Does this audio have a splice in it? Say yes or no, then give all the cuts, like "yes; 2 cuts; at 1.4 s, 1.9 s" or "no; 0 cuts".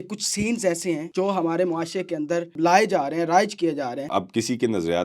yes; 3 cuts; at 1.1 s, 2.5 s, 4.0 s